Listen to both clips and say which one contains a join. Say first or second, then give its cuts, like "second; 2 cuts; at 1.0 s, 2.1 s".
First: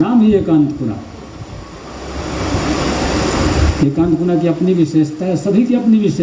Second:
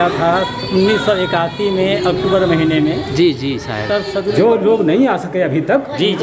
second; 1 cut; at 4.3 s